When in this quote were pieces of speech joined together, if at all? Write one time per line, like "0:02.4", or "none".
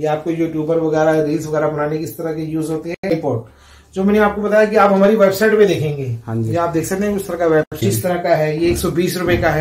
0:03.1
0:07.7